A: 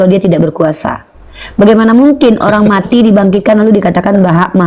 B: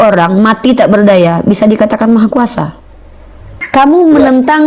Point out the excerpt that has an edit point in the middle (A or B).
B